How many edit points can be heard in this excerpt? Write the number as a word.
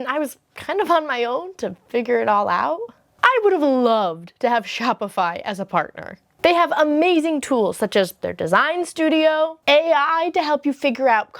one